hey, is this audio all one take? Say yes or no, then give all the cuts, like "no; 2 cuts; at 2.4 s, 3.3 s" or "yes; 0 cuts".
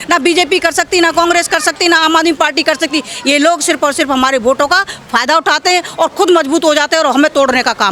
yes; 0 cuts